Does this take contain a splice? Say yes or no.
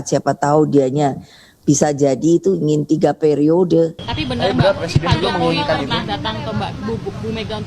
yes